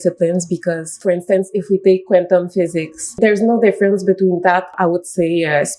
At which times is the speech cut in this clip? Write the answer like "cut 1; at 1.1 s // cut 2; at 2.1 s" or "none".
cut 1; at 1.0 s // cut 2; at 3.2 s // cut 3; at 4.7 s

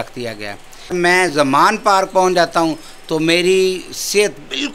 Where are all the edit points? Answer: cut 1; at 0.9 s

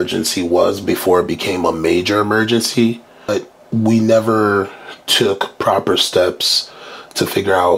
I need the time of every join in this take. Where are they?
cut 1; at 3.3 s

